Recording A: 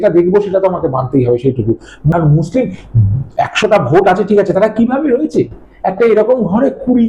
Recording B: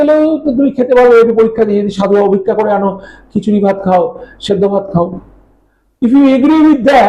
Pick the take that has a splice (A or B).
A